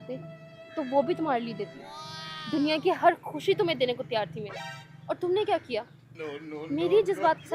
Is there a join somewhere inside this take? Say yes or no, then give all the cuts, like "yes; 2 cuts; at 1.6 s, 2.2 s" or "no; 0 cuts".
no; 0 cuts